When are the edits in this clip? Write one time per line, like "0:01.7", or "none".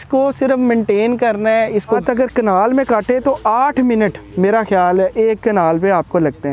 0:02.0